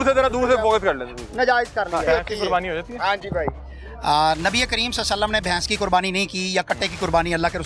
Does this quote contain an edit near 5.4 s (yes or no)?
no